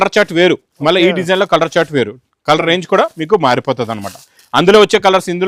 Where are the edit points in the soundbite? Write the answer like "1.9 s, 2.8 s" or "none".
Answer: none